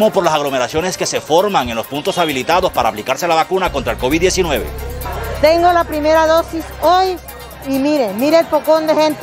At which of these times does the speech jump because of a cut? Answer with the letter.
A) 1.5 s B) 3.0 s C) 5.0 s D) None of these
C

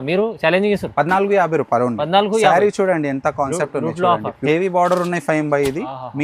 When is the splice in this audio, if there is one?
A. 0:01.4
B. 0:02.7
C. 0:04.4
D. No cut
C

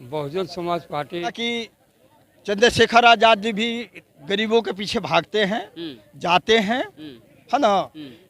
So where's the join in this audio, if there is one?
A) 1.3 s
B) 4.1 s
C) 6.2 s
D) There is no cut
A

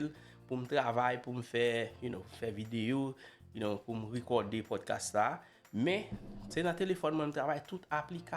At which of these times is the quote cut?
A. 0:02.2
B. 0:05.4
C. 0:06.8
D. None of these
D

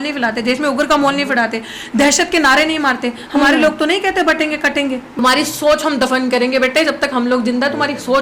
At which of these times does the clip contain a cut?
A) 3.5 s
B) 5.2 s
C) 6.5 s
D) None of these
B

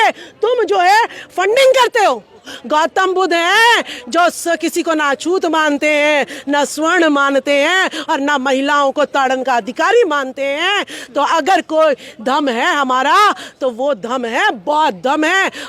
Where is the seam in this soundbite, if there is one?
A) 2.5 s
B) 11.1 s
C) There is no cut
A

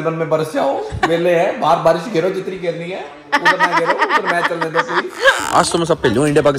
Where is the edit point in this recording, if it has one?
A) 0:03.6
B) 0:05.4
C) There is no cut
B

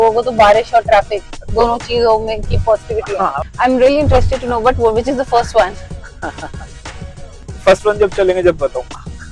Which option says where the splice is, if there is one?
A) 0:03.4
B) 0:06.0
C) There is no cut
A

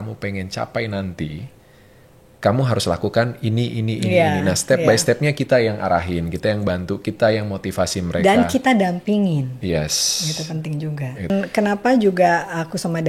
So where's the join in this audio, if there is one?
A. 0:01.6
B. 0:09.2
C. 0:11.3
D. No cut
C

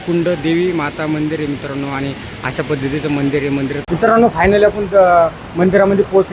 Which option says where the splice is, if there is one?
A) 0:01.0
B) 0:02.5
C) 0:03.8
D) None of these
C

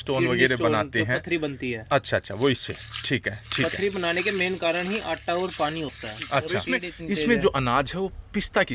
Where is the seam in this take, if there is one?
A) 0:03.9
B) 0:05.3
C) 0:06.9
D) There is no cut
C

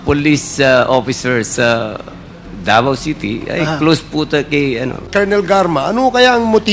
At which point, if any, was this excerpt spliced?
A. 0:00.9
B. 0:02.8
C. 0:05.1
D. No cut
C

